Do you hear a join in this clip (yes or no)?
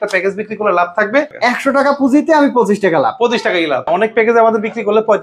yes